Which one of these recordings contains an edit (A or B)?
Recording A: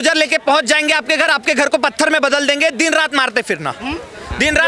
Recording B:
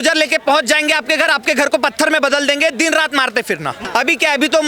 B